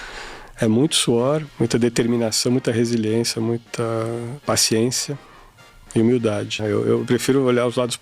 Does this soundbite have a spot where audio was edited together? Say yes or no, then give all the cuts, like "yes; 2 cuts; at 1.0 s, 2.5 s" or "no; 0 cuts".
yes; 3 cuts; at 1.5 s, 4.3 s, 6.6 s